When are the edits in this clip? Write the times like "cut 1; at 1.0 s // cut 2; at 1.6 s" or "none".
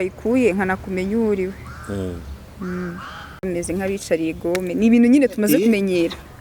cut 1; at 3.4 s